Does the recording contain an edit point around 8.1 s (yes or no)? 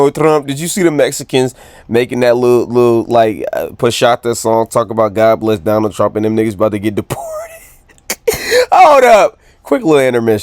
no